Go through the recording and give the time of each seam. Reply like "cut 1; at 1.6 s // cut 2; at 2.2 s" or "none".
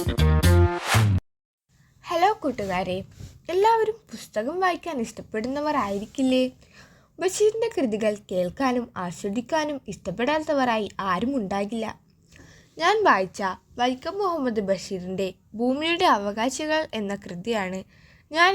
cut 1; at 1.5 s